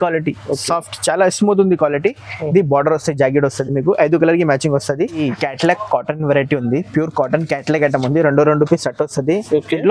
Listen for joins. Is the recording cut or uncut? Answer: cut